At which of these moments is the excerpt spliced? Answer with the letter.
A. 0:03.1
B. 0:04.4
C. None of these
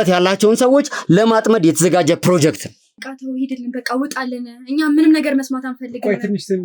A